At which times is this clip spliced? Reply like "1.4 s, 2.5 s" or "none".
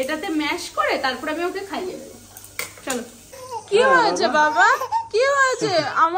none